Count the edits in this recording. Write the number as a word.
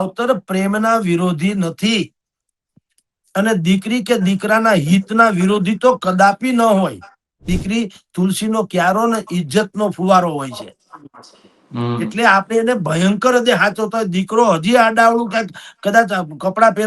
one